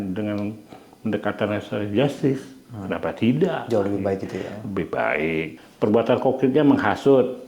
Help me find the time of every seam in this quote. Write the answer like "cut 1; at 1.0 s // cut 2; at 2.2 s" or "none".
cut 1; at 5.6 s